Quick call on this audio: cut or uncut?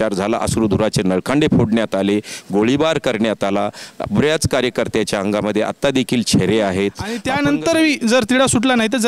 cut